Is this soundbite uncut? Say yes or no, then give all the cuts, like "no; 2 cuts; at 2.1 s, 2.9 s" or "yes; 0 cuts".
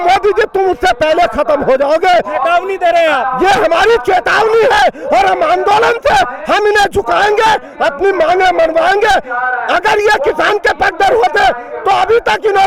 yes; 0 cuts